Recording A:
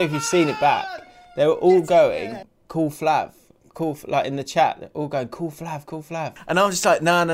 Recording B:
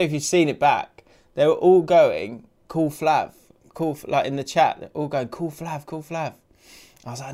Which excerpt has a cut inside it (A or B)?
A